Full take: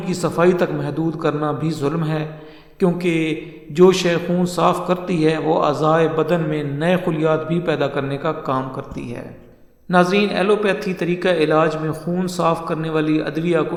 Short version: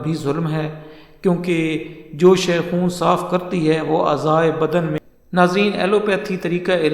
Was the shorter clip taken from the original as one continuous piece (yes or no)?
no